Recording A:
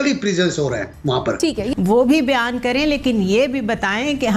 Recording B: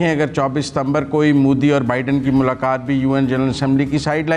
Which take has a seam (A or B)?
A